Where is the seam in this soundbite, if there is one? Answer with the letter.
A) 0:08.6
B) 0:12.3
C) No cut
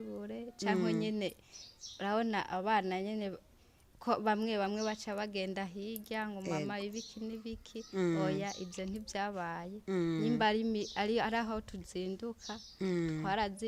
C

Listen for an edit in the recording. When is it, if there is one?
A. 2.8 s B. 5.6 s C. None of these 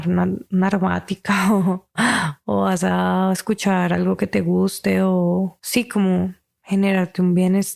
B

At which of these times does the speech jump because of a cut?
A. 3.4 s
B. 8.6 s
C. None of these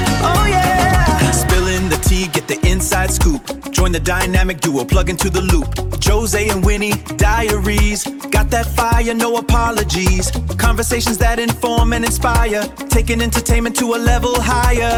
C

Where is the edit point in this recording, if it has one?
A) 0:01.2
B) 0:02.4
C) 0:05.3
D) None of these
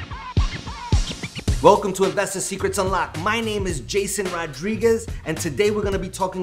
A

